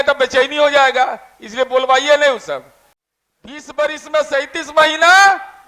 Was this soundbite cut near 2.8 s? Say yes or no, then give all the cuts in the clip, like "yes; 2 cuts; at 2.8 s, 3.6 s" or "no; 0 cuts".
yes; 1 cut; at 2.8 s